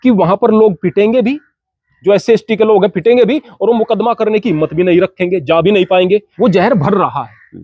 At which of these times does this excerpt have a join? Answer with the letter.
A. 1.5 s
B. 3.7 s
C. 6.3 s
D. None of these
C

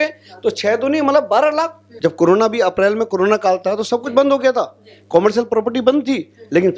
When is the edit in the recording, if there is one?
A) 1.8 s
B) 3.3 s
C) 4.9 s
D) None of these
A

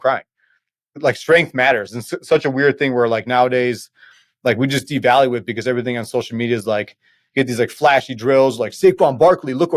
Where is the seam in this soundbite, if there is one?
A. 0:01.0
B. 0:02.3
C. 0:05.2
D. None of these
A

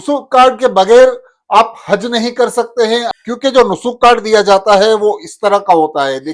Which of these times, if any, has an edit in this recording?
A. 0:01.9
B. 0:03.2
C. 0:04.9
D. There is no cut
B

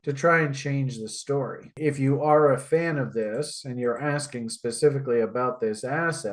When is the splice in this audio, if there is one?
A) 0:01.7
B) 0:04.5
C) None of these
A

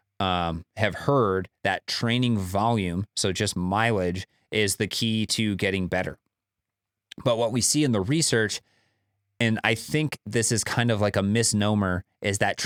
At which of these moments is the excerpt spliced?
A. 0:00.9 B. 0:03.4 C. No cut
C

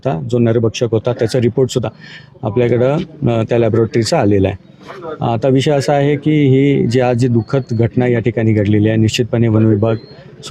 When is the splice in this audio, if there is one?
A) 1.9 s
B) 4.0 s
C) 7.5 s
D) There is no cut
A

